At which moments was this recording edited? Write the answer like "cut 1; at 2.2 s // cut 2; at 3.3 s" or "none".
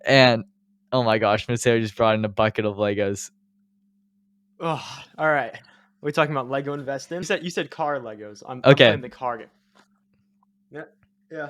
cut 1; at 7.2 s